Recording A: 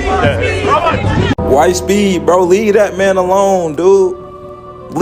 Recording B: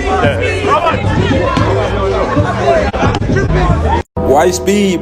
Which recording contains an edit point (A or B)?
A